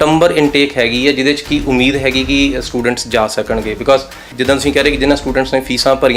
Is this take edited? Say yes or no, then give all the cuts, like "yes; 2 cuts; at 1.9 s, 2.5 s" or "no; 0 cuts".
yes; 1 cut; at 4.3 s